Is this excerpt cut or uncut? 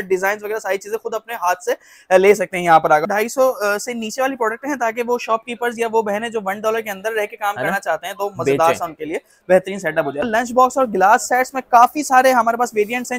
cut